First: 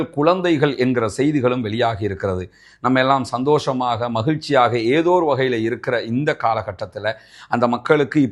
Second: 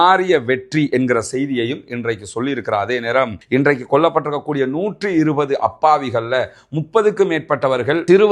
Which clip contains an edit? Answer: second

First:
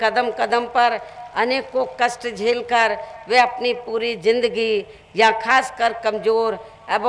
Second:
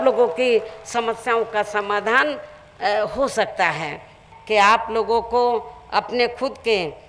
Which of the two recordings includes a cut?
second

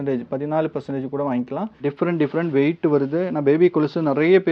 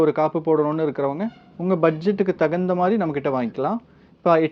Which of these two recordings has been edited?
first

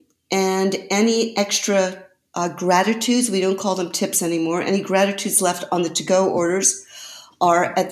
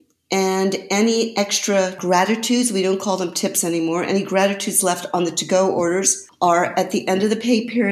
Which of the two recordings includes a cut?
second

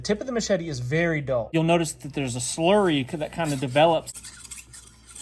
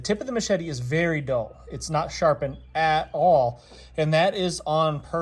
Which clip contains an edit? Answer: first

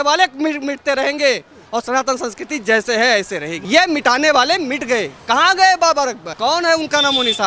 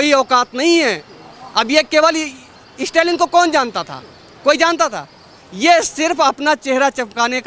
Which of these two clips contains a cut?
first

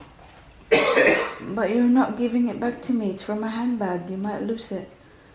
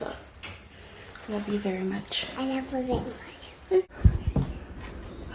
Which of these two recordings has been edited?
second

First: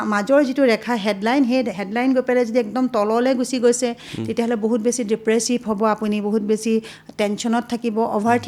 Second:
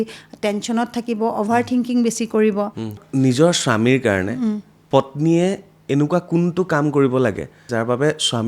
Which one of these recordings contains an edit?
second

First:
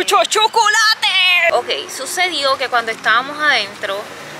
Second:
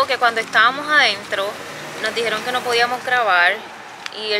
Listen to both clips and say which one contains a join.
first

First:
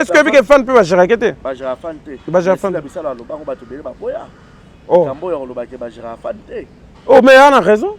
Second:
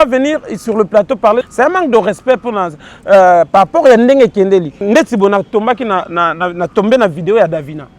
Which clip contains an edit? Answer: second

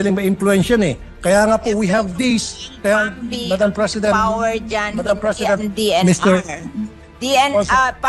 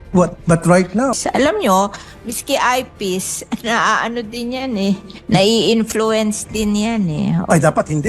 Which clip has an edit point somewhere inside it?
second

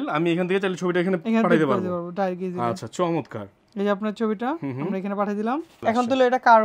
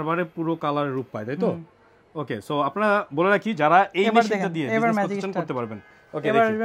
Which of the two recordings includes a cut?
first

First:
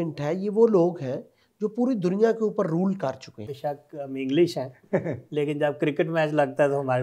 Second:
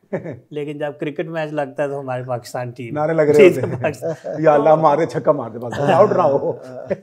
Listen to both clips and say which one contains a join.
first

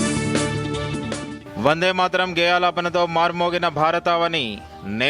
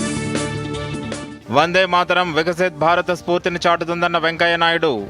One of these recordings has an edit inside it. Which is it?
first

